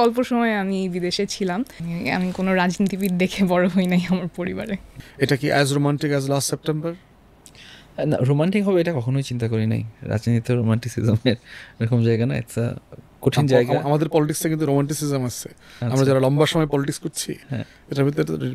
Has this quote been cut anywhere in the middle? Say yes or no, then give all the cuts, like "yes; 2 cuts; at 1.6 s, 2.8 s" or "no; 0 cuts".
yes; 2 cuts; at 1.8 s, 4.9 s